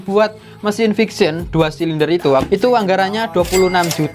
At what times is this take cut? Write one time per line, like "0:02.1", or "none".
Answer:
0:02.4